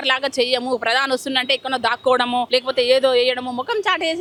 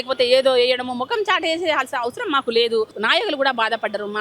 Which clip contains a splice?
second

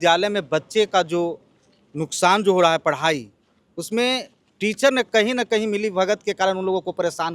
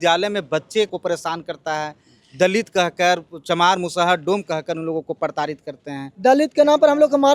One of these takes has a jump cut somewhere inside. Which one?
second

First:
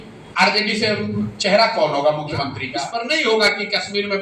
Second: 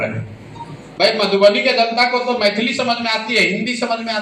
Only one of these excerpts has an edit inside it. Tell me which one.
first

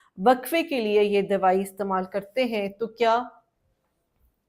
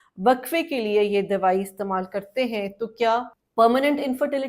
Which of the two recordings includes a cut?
second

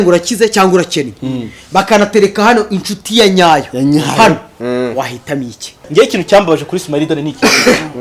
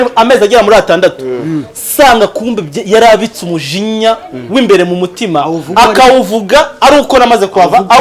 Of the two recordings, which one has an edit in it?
first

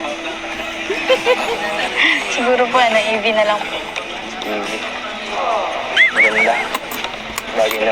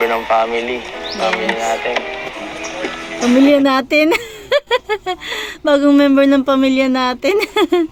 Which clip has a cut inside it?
first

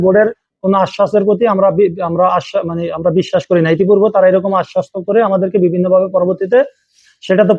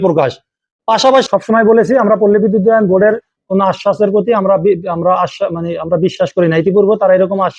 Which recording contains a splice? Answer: second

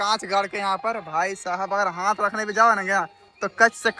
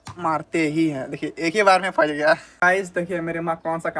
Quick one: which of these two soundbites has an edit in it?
second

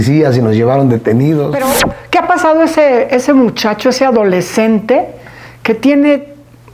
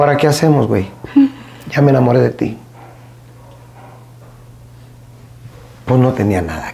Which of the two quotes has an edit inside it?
first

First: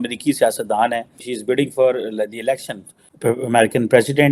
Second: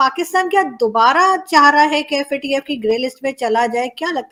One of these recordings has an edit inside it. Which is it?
first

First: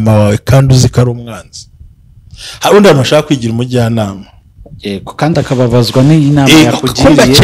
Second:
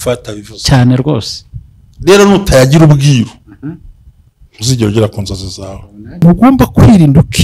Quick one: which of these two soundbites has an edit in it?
second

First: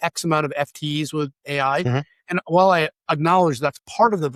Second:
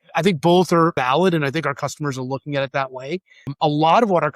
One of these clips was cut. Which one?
second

